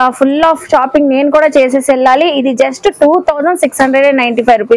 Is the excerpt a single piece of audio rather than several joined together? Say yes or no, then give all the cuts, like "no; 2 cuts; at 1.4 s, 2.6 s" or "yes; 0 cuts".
yes; 0 cuts